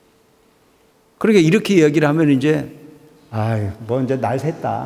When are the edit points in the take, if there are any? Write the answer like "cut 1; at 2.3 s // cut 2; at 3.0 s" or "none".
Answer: cut 1; at 0.9 s